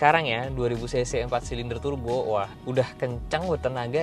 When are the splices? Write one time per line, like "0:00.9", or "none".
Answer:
0:02.6